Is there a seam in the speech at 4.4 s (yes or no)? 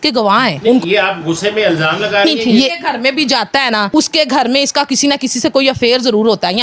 no